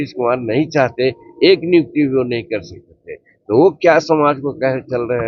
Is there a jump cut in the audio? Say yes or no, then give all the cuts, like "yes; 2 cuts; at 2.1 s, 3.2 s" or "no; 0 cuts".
no; 0 cuts